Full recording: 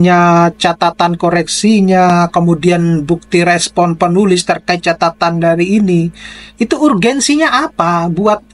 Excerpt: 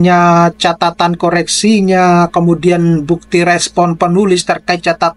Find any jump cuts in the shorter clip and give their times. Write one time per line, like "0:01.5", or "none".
none

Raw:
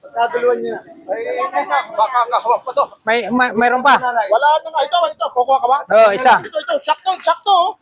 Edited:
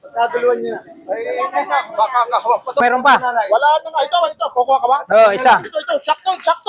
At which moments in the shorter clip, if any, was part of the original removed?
0:02.8

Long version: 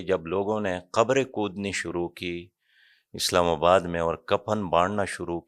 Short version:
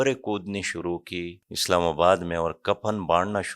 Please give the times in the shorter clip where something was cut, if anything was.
0:01.5

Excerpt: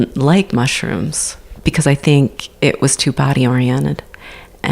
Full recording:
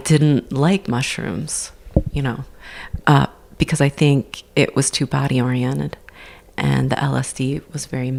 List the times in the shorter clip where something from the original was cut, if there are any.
0:01.4

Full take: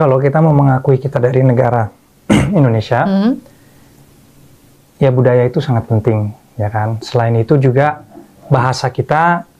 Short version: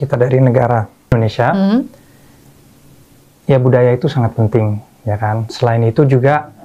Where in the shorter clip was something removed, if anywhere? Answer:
0:01.1

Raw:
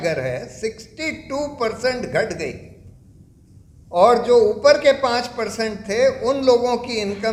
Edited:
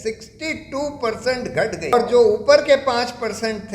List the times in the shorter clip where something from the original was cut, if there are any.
0:01.9

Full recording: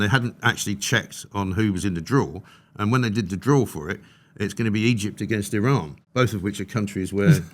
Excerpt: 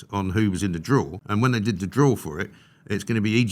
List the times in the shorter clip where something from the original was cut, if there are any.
0:01.2

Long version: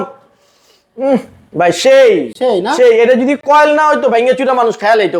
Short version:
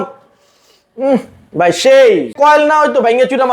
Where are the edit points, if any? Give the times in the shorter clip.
0:02.3

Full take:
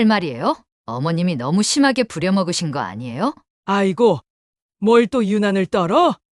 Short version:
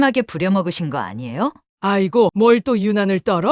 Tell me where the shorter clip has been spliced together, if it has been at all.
0:01.8

